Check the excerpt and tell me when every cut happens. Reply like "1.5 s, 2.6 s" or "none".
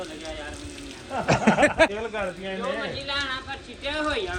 1.9 s

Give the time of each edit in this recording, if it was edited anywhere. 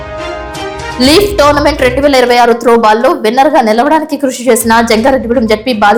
none

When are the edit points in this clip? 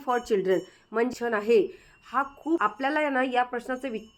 1.1 s, 2.6 s

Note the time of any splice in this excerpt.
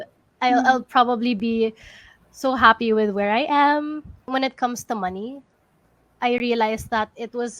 4.3 s

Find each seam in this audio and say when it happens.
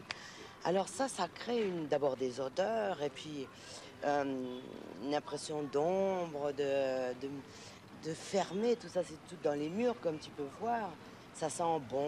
none

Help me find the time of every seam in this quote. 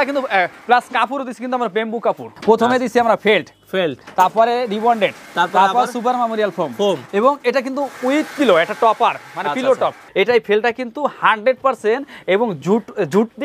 2.3 s, 10.0 s

